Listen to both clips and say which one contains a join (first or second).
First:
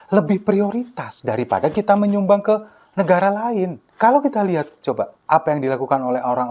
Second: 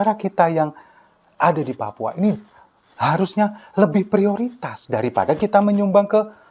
first